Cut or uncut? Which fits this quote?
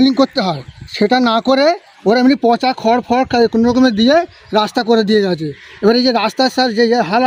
uncut